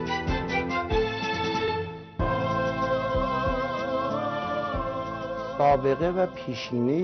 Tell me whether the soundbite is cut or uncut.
uncut